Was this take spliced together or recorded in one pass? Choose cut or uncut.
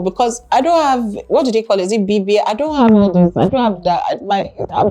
uncut